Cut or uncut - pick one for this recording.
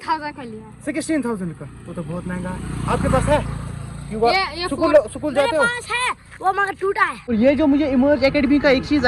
cut